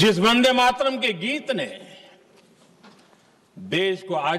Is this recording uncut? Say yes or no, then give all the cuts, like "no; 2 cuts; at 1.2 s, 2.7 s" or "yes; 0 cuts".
yes; 0 cuts